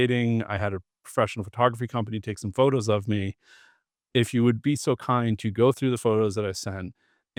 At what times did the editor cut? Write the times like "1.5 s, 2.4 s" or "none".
none